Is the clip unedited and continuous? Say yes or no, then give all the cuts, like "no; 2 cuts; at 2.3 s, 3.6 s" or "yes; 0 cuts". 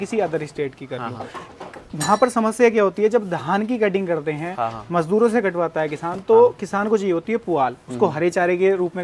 yes; 0 cuts